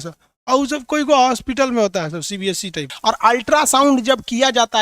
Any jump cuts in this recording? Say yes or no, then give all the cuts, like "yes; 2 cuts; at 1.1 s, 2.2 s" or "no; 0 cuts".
yes; 1 cut; at 2.9 s